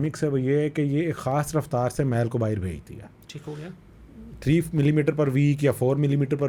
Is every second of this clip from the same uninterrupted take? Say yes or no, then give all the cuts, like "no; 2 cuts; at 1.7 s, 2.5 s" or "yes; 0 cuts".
yes; 0 cuts